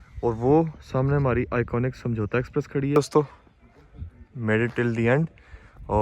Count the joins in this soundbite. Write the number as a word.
one